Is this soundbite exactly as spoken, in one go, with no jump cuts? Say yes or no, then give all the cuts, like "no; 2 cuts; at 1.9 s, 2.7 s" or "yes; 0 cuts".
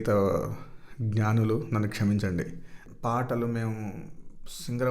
no; 1 cut; at 2.9 s